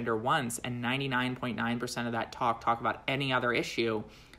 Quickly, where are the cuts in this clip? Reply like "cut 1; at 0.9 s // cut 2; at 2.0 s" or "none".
none

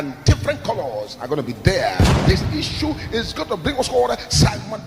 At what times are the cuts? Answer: cut 1; at 2.2 s

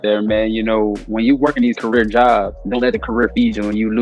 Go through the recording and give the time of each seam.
cut 1; at 1.0 s // cut 2; at 2.6 s

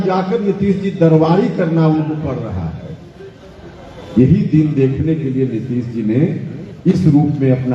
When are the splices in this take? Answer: none

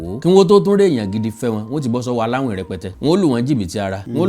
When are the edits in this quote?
cut 1; at 2.9 s

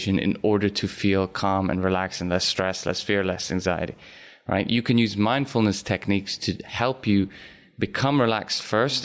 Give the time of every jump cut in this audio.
none

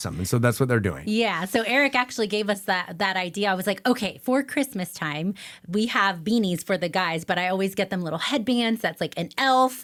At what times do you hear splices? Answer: none

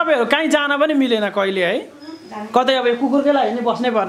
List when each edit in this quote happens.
none

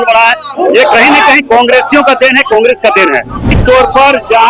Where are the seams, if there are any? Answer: cut 1; at 3.5 s

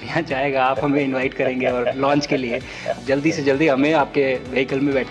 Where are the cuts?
cut 1; at 2.9 s

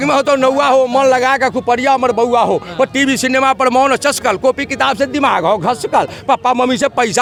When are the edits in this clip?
none

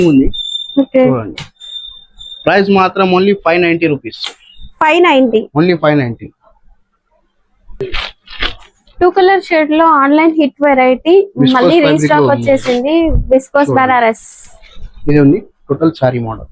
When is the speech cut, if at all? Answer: none

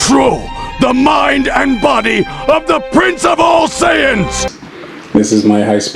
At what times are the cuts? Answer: none

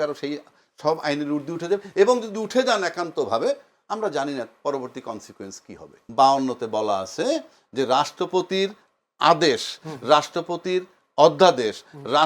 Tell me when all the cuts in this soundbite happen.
cut 1; at 6.0 s

